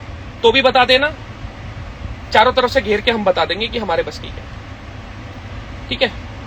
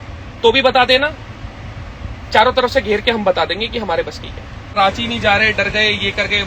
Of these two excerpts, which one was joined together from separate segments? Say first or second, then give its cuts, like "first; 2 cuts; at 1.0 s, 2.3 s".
second; 1 cut; at 4.7 s